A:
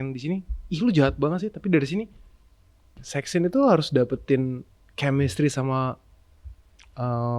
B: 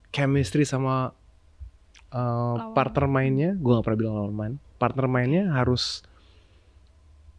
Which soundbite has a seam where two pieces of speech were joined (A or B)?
A